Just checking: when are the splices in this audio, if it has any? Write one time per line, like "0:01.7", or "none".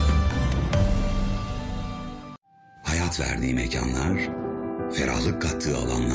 0:02.4